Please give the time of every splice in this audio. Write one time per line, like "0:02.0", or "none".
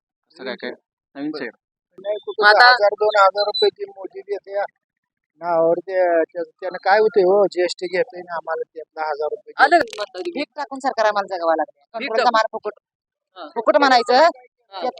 0:02.0
0:09.8